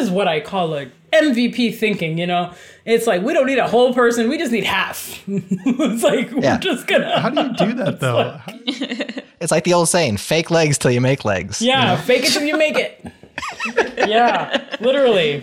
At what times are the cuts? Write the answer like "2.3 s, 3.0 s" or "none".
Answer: none